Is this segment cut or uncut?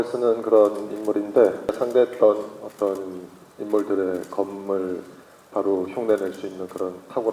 cut